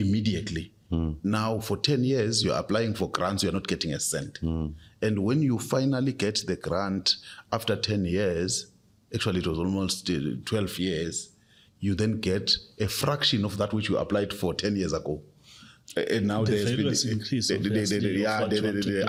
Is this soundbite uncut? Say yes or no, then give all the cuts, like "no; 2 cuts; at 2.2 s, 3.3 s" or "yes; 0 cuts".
yes; 0 cuts